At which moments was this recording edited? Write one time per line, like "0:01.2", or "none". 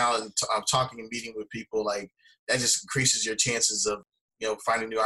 0:04.0